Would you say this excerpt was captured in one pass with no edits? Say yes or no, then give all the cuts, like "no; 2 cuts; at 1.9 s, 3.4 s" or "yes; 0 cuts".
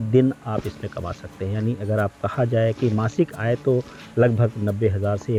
yes; 0 cuts